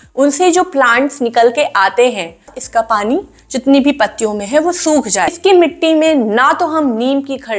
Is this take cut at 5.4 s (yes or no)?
yes